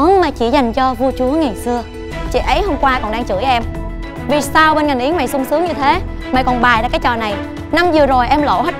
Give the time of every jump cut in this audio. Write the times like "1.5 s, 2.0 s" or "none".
2.1 s